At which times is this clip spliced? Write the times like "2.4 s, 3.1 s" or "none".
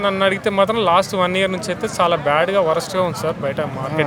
none